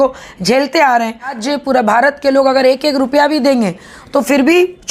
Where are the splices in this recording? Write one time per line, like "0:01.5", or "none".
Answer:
0:01.4